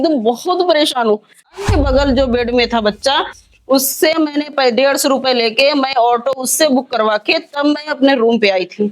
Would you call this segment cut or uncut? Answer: cut